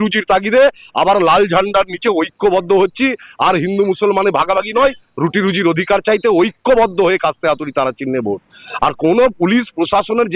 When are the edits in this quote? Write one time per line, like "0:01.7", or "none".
none